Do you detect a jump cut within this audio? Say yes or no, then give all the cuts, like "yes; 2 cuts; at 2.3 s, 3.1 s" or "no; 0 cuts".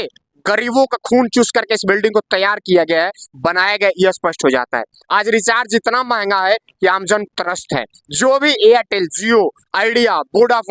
no; 0 cuts